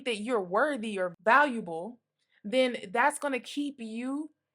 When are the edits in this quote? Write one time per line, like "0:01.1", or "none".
0:01.1